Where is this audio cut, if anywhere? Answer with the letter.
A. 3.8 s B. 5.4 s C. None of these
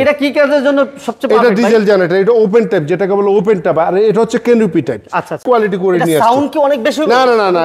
B